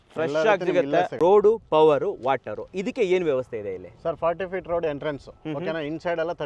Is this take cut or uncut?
cut